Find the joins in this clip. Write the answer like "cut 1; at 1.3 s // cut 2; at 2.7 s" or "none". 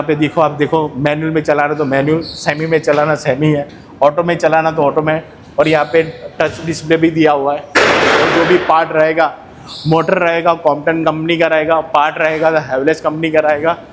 none